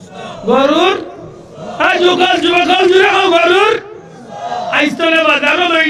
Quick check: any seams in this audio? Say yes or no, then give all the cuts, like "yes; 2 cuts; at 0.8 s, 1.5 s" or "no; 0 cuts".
no; 0 cuts